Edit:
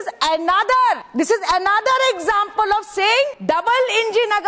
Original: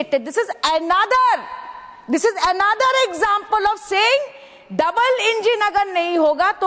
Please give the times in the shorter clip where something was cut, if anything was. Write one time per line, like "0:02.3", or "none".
0:01.1
0:03.4